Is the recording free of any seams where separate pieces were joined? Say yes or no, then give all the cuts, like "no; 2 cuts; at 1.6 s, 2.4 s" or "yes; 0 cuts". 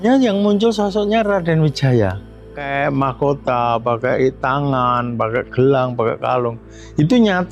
no; 1 cut; at 2.6 s